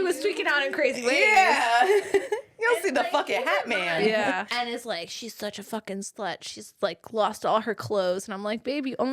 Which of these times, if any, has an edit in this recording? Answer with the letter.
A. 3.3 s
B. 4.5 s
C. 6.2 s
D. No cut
B